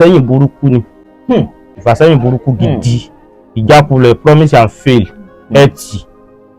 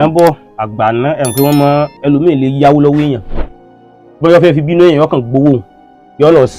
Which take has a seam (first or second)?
first